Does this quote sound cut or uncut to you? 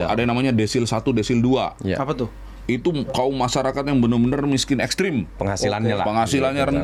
uncut